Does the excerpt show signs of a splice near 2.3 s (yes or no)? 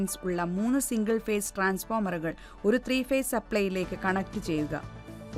no